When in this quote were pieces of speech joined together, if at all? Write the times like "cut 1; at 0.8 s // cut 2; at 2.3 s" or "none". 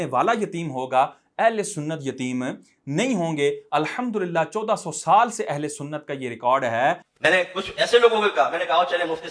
cut 1; at 7.0 s